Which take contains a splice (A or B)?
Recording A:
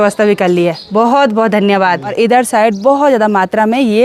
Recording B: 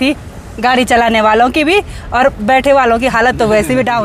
A